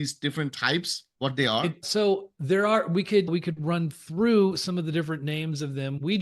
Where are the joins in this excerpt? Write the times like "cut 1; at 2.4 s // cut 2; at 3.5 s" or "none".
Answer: cut 1; at 1.8 s